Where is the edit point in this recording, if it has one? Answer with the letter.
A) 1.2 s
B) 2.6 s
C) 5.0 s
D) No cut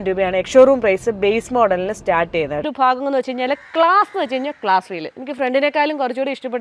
B